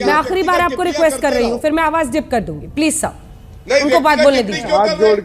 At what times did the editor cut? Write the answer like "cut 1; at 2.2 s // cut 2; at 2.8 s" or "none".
none